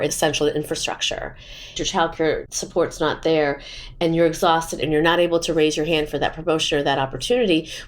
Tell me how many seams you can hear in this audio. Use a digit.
2